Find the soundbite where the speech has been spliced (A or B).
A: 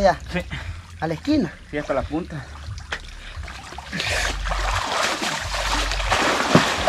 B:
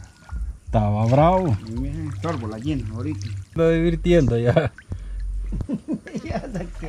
B